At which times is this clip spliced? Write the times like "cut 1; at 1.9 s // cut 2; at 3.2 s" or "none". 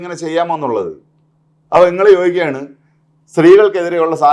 none